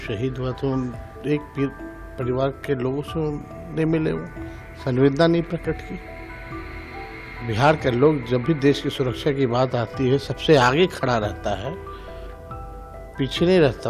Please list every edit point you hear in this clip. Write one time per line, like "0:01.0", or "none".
0:06.0
0:07.4